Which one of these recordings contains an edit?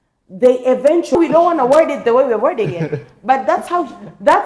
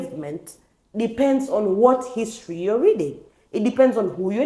first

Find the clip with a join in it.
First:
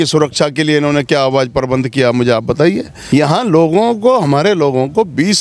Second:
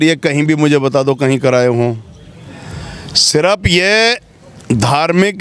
first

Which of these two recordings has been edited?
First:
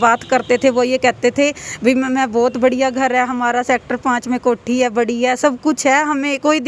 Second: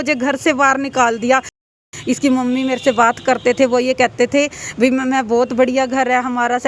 second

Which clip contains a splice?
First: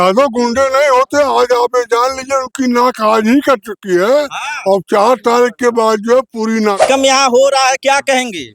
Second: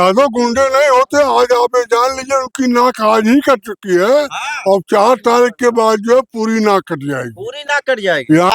first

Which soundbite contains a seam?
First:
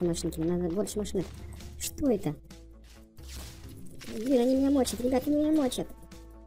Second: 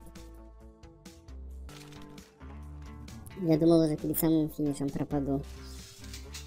second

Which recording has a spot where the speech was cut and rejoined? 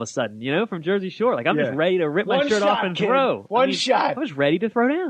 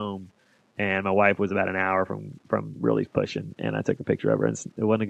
first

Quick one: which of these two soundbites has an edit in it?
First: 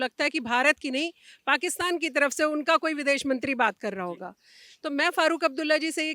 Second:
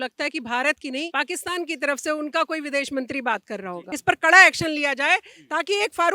second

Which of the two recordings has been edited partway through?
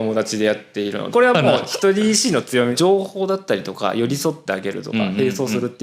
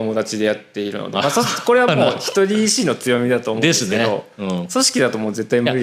first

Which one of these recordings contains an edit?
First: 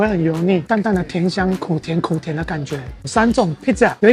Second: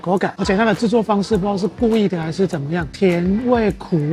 first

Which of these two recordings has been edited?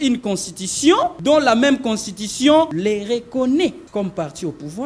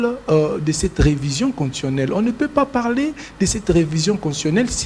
first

